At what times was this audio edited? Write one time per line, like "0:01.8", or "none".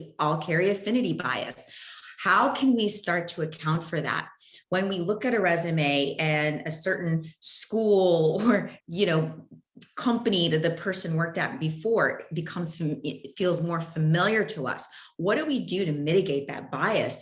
0:08.7